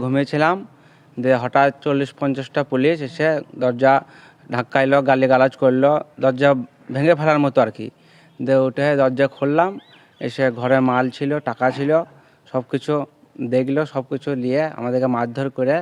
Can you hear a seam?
no; 0 cuts

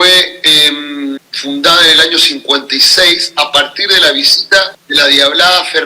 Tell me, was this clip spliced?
yes; 2 cuts; at 1.2 s, 4.8 s

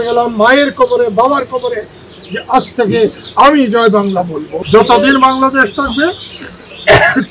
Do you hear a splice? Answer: yes; 1 cut; at 4.4 s

